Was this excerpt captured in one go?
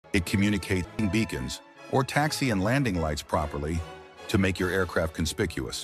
no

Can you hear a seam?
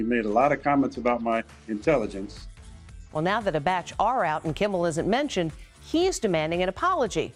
no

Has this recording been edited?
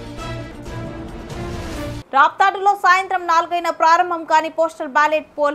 yes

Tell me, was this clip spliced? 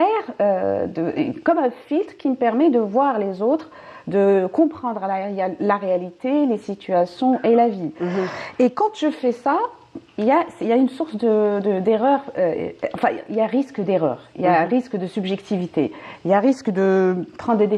no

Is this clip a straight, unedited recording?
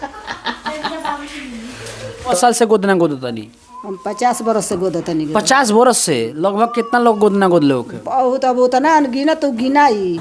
no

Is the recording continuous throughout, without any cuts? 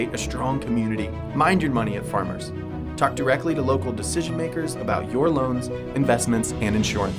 yes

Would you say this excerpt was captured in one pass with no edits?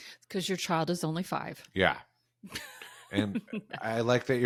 yes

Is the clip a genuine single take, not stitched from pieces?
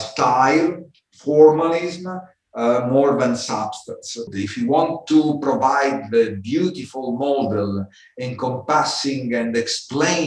no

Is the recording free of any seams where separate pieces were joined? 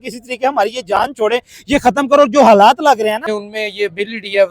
no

